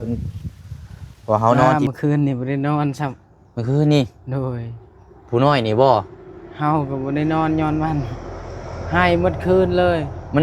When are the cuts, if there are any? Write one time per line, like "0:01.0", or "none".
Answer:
0:01.7